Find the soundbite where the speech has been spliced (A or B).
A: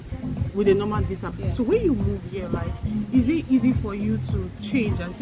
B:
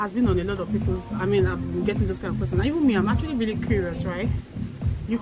A